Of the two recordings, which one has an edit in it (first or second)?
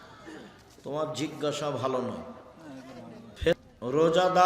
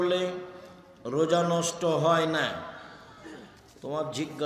first